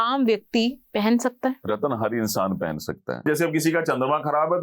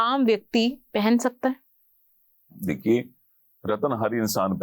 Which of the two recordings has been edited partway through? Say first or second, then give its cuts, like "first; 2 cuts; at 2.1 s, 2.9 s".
first; 2 cuts; at 1.6 s, 3.2 s